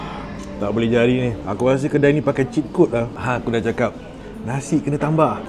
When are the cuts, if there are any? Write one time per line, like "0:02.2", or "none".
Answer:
0:01.4
0:03.2

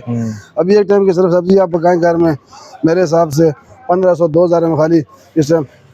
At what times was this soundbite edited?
none

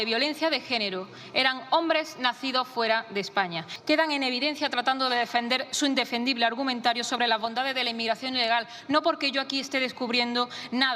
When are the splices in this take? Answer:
0:03.7

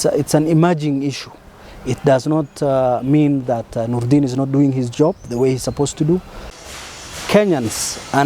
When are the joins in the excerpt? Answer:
0:06.5

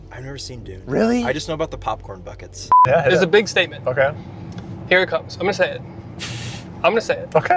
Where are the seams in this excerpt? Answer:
0:02.8

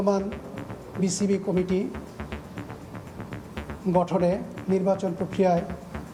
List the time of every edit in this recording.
none

